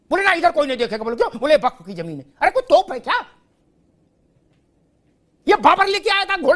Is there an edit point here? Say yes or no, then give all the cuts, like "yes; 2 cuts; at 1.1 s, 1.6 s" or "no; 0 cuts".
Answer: no; 0 cuts